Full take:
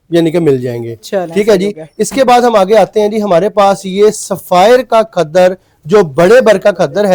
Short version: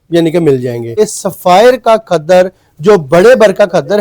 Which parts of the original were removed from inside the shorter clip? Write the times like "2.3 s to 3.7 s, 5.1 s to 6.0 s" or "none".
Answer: 1.0 s to 4.0 s